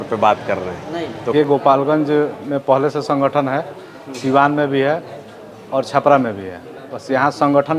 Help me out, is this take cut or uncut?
cut